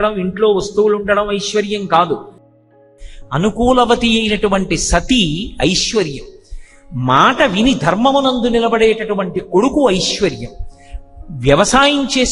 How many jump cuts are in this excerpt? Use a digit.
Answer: 1